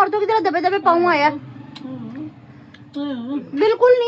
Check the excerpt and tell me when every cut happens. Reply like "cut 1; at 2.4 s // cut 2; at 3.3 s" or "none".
none